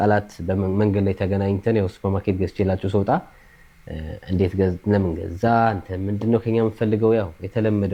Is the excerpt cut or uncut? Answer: uncut